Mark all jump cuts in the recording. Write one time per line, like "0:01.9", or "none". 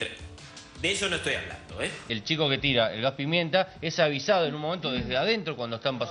0:02.0